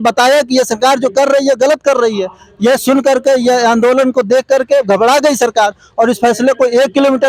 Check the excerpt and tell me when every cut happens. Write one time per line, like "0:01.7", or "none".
none